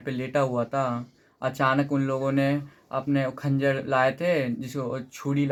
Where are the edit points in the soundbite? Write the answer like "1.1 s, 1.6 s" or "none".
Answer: none